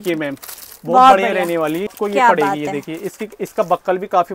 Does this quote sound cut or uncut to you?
cut